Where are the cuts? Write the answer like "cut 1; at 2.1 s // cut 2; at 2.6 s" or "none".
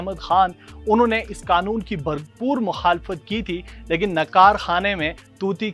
none